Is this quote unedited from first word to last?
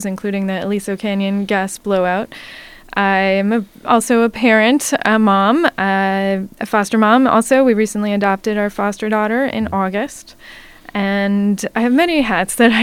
yes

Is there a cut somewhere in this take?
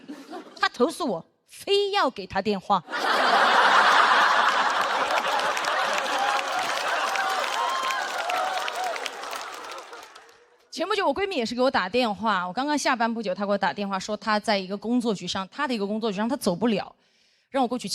no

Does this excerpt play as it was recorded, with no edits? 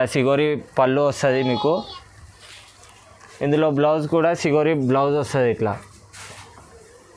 yes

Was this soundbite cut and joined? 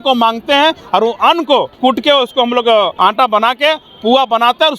yes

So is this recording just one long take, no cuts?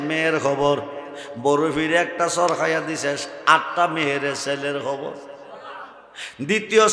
yes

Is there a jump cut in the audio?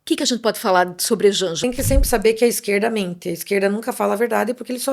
yes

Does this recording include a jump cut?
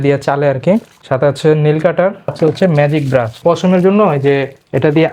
yes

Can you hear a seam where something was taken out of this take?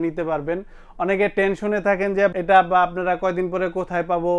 yes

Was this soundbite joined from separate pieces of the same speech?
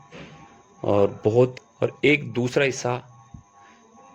yes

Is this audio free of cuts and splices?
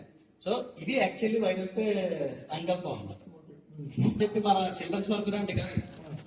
no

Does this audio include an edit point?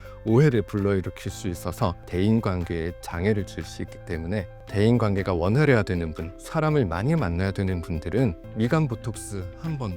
yes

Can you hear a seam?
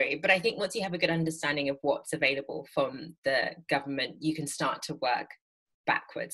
no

